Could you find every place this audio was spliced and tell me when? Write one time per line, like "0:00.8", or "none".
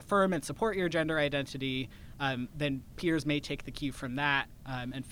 none